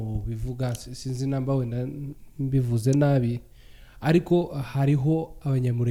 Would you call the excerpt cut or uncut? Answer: uncut